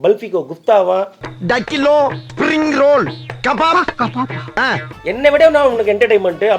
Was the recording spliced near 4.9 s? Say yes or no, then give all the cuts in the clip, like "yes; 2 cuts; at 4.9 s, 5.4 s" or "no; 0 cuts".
yes; 1 cut; at 4.9 s